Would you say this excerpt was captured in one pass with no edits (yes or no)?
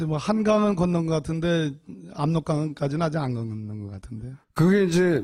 yes